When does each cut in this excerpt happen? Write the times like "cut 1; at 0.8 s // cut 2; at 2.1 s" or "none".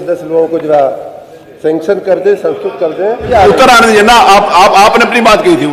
cut 1; at 3.3 s